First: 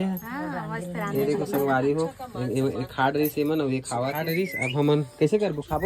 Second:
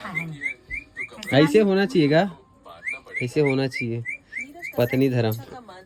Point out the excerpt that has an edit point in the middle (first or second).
first